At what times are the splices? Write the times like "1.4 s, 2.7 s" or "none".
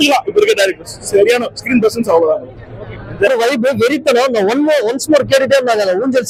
none

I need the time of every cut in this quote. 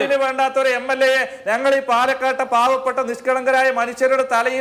none

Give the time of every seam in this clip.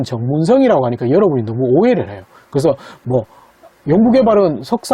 none

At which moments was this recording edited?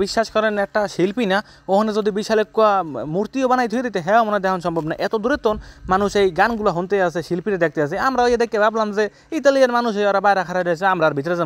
none

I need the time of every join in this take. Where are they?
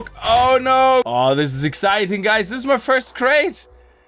1.1 s

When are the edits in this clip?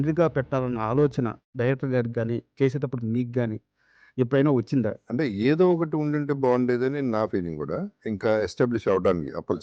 4.9 s, 8.0 s

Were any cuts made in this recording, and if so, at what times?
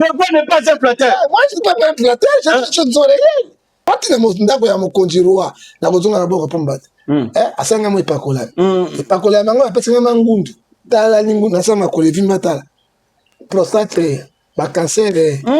3.8 s

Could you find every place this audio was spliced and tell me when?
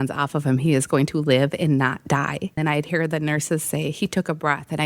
2.6 s

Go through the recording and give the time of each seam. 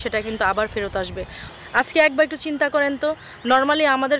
1.4 s

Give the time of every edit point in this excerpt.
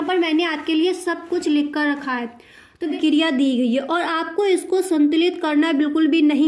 2.9 s

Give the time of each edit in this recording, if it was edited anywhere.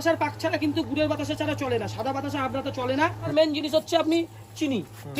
3.3 s

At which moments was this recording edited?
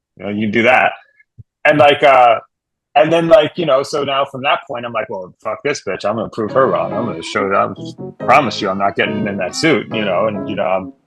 none

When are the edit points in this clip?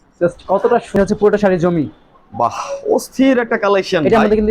0.9 s

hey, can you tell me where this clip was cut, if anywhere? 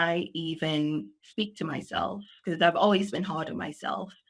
none

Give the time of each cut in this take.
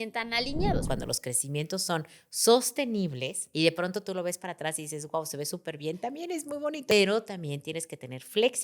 0.8 s, 3.4 s, 6.9 s

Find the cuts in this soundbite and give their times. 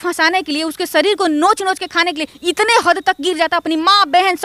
none

